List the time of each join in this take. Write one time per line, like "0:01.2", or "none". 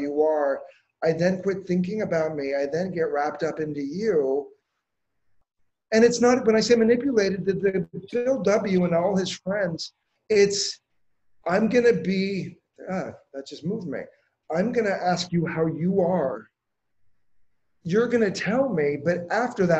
0:05.3